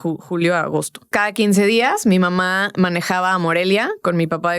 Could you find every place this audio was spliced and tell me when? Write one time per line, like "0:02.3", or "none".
0:01.1